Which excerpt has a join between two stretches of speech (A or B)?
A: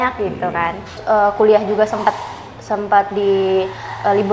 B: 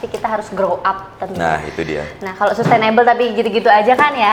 A